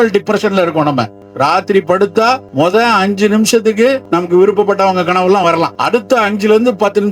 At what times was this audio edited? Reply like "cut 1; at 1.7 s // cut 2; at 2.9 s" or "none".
cut 1; at 1.2 s // cut 2; at 2.5 s // cut 3; at 4.0 s // cut 4; at 5.8 s